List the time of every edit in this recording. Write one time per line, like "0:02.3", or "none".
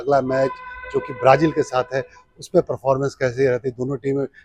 none